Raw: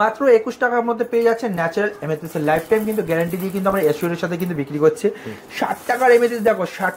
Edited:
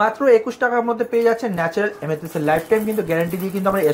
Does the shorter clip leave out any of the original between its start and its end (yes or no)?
no